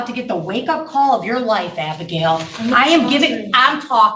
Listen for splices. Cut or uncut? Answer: uncut